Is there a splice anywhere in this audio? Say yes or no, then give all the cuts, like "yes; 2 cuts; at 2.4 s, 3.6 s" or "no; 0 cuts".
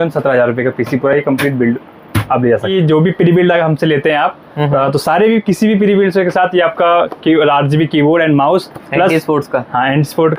yes; 1 cut; at 2.7 s